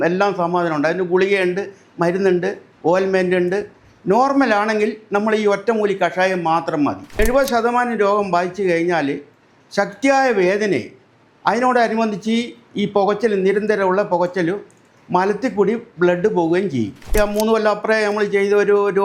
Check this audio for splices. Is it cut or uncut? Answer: cut